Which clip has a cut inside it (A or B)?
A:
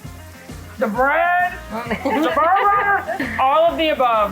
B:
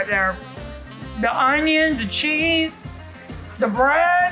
A